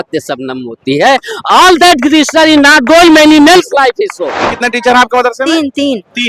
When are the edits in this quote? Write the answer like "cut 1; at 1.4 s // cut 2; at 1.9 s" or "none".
cut 1; at 4.5 s